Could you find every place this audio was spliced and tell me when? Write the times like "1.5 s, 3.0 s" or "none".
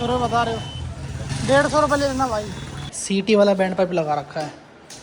1.3 s, 2.9 s

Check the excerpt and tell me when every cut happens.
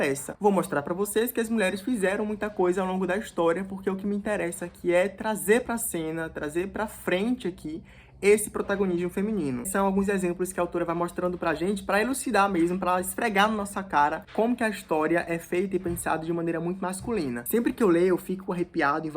9.6 s, 17.4 s

